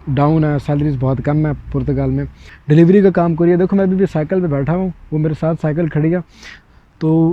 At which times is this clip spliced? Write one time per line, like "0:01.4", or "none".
0:02.5